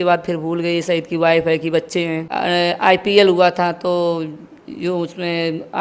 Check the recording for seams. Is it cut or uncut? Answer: cut